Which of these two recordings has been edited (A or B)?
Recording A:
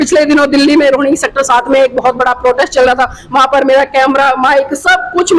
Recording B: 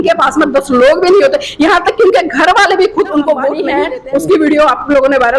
B